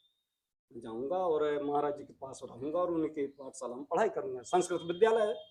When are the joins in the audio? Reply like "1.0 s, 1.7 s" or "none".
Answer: none